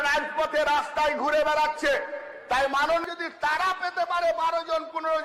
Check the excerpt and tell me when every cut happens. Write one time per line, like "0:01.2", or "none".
0:03.1